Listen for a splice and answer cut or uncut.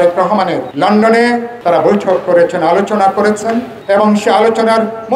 cut